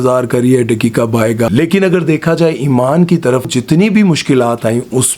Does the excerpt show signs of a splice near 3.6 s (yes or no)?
yes